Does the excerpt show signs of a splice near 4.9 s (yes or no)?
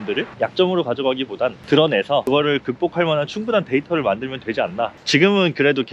yes